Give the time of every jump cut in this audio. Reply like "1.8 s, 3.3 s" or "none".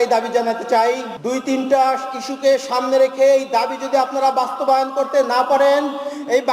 1.1 s

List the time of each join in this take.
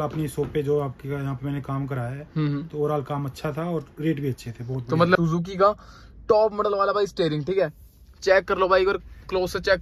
5.2 s

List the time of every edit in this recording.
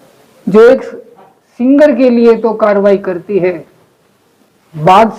none

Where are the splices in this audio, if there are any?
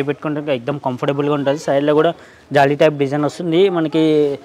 none

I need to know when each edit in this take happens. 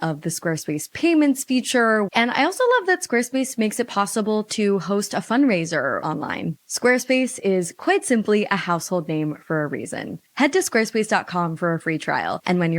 2.1 s, 6.0 s

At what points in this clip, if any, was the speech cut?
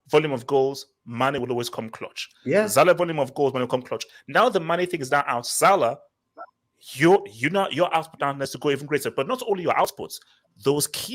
none

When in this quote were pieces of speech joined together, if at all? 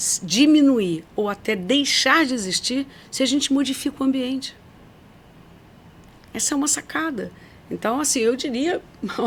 none

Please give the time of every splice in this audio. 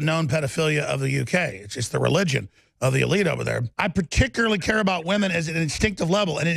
3.7 s

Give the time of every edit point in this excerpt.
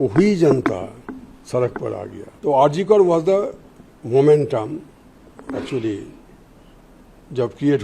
2.2 s

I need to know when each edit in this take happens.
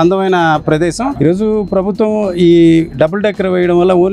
1.2 s

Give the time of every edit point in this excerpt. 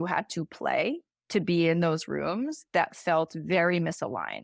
1.1 s

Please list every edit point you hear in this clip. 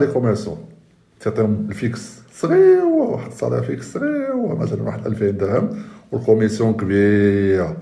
none

